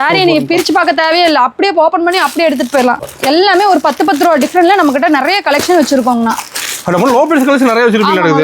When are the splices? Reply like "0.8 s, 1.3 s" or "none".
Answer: 3.1 s